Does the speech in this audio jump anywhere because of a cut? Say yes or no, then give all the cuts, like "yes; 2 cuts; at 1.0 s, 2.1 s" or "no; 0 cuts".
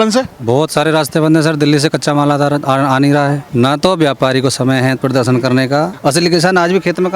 yes; 2 cuts; at 3.4 s, 5.9 s